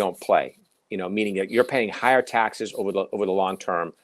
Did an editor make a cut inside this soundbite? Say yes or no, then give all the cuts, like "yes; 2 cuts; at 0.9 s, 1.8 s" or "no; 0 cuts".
no; 0 cuts